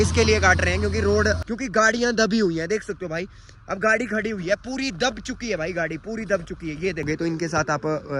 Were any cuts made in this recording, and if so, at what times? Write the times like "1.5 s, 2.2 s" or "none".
1.4 s, 7.1 s